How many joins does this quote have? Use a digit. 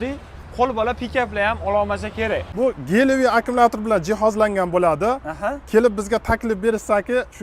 1